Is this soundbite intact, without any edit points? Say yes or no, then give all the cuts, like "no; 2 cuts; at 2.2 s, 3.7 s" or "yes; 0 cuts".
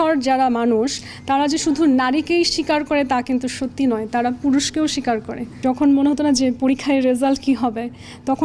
no; 1 cut; at 5.6 s